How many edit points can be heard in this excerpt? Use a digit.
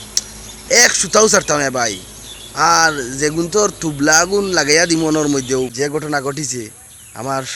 1